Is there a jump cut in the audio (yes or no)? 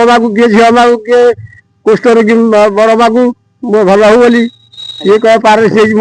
no